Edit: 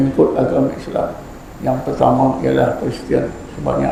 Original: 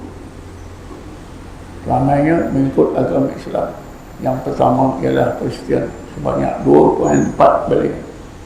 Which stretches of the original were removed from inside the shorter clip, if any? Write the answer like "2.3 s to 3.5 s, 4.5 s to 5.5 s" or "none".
none